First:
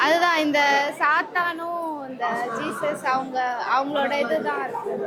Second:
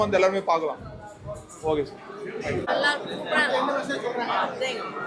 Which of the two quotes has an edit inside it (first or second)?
second